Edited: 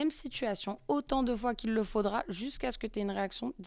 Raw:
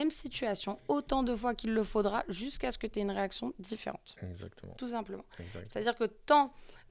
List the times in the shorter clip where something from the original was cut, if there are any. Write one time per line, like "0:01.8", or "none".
none